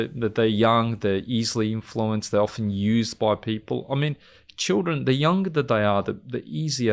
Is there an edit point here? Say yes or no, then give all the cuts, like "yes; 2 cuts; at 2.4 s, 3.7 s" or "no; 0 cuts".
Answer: no; 0 cuts